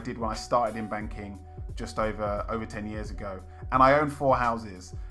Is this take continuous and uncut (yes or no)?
yes